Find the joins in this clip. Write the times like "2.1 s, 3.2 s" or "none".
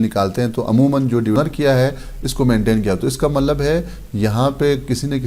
1.4 s